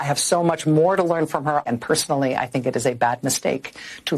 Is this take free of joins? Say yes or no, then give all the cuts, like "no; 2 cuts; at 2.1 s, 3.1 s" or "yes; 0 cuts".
no; 1 cut; at 1.7 s